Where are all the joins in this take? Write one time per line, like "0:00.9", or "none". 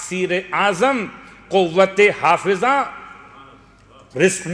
none